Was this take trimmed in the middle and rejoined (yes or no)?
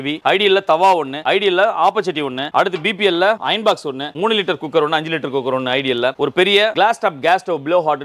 no